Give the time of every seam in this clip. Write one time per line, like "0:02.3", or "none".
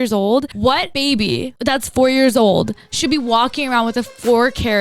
0:00.9

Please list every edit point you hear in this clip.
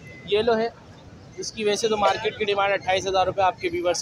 none

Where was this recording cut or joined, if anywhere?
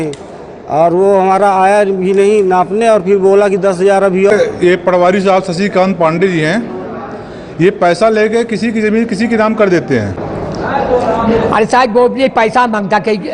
0:04.3
0:10.2

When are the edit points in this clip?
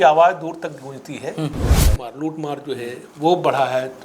0:02.0

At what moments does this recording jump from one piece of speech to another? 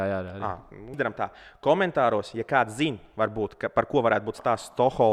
0:00.9

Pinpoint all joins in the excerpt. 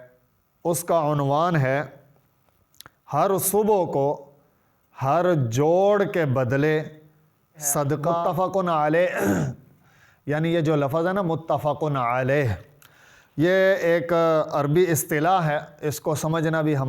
0:08.2

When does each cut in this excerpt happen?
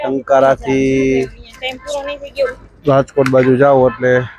none

